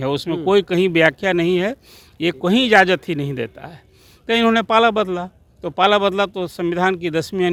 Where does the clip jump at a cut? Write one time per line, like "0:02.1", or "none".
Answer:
none